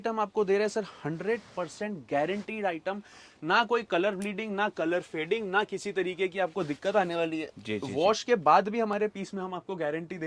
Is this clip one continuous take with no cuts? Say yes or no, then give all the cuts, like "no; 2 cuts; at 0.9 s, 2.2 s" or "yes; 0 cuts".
yes; 0 cuts